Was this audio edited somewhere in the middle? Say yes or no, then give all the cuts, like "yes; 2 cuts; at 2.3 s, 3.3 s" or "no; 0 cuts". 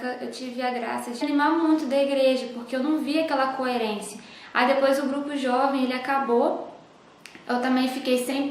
no; 0 cuts